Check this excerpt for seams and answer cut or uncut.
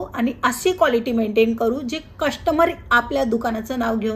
uncut